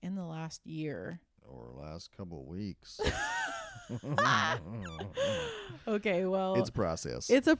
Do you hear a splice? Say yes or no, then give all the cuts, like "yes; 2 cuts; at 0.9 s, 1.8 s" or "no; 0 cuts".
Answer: no; 0 cuts